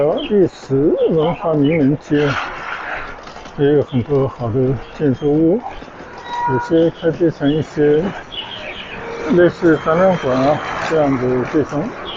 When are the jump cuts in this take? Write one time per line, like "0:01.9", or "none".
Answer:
none